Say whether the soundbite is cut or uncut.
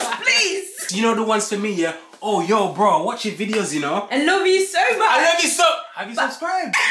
cut